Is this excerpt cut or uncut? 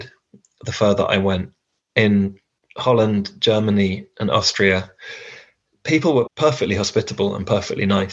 cut